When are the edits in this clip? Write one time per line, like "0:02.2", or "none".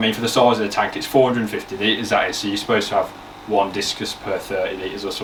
none